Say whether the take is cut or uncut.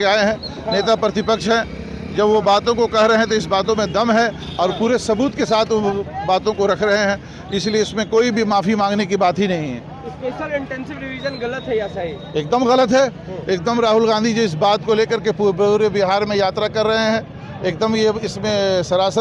uncut